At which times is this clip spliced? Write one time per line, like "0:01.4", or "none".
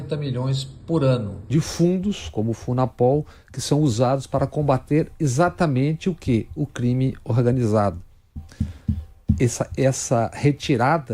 0:01.3